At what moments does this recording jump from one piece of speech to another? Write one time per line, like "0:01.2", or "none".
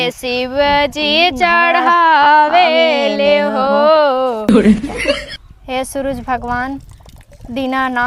0:04.5

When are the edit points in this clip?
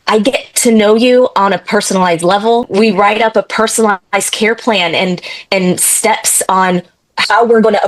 0:02.7

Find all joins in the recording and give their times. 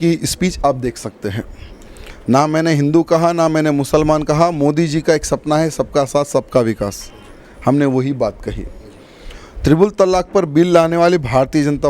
none

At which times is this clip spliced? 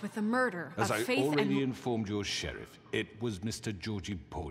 none

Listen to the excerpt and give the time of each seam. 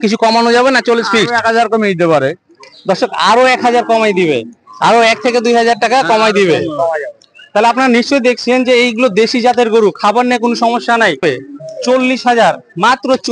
0:11.2

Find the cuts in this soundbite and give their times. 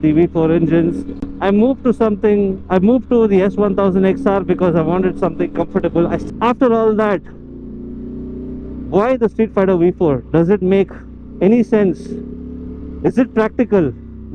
0:06.2

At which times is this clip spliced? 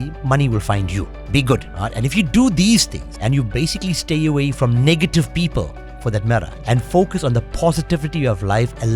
0:01.2
0:01.7
0:03.0
0:06.5

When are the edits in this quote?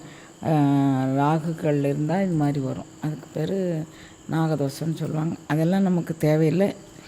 none

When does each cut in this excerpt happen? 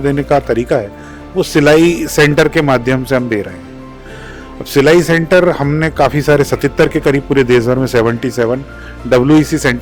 none

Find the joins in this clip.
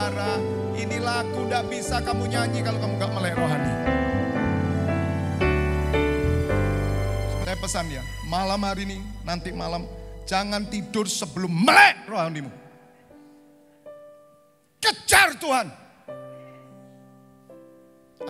0:07.4

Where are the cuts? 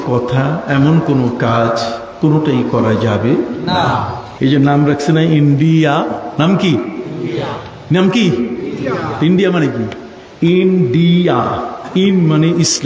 0:04.2

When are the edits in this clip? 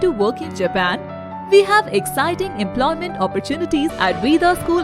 0:03.9

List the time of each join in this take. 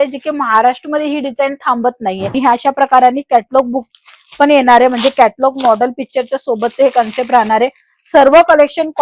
0:02.4

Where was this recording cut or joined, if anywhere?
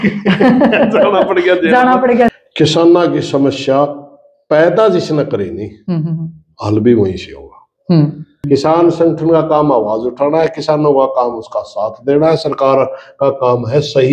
0:02.3
0:08.4

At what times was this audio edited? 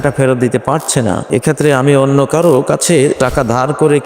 0:01.2

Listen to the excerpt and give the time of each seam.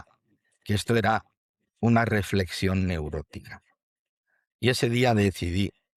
none

